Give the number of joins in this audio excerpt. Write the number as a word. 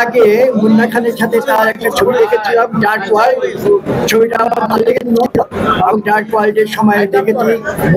zero